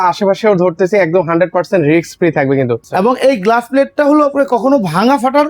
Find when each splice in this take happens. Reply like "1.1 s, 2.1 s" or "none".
2.8 s